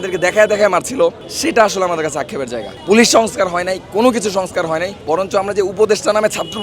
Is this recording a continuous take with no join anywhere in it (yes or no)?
no